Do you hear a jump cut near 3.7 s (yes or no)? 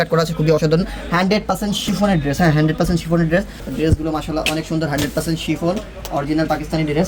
yes